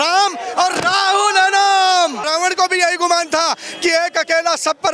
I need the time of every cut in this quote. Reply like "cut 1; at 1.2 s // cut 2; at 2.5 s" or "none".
cut 1; at 2.2 s